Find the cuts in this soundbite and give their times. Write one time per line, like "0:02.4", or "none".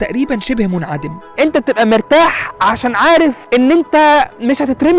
0:01.3
0:03.4